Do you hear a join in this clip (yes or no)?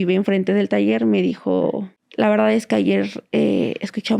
yes